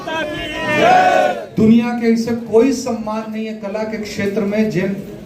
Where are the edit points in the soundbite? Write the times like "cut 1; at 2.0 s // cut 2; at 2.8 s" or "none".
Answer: cut 1; at 1.4 s